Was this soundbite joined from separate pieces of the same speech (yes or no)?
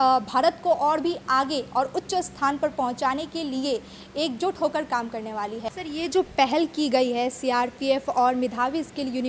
yes